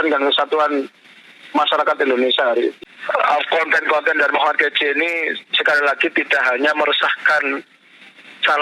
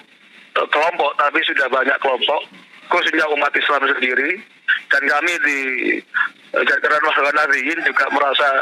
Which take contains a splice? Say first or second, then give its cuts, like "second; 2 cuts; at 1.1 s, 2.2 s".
first; 1 cut; at 2.9 s